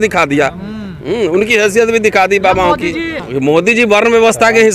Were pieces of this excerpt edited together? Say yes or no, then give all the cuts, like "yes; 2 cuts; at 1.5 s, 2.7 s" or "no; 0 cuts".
yes; 1 cut; at 3.2 s